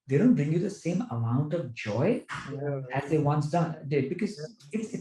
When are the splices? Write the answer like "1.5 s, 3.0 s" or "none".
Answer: none

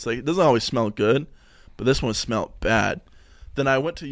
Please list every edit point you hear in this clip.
none

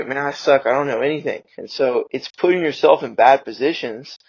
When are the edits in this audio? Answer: 1.9 s

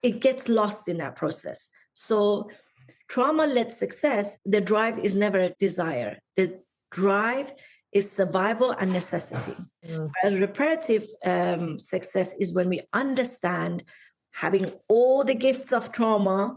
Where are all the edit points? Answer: none

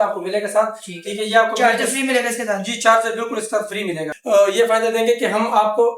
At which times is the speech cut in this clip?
4.1 s

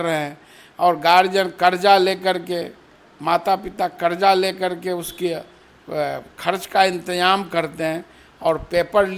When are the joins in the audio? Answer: none

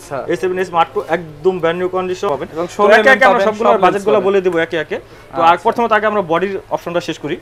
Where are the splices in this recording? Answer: 2.3 s

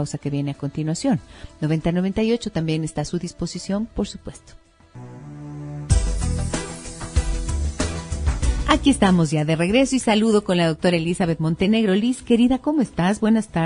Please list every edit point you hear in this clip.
2.5 s

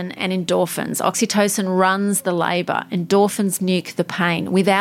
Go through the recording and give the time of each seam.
none

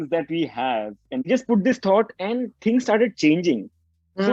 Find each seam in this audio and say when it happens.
1.3 s

